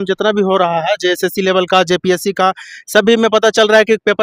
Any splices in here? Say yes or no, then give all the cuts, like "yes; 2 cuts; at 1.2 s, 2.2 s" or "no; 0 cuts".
no; 0 cuts